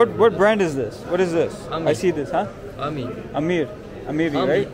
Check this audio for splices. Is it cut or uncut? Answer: uncut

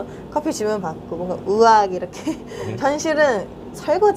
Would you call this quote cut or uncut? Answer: cut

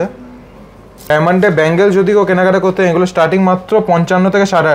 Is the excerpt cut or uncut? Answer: cut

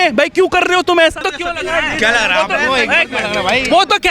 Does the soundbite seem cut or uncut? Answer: cut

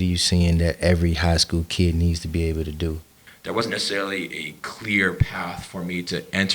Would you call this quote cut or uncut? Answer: cut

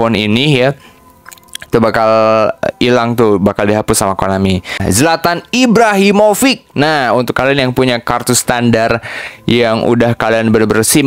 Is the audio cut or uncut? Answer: cut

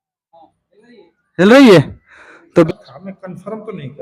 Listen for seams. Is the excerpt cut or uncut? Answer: cut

